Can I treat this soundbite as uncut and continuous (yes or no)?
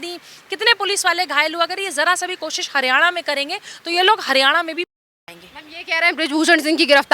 yes